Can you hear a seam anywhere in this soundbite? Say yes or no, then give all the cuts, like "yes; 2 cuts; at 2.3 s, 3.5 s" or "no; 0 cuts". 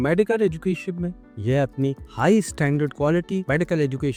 no; 0 cuts